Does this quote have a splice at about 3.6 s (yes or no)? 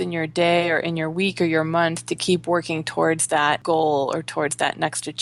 yes